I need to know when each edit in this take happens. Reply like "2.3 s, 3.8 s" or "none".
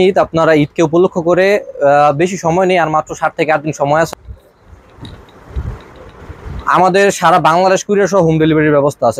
4.1 s